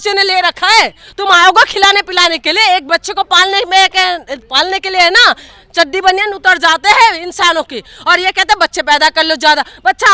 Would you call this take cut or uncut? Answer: uncut